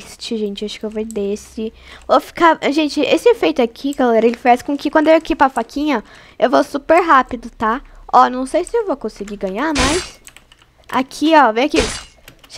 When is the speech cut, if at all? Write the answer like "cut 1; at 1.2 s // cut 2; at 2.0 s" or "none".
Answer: none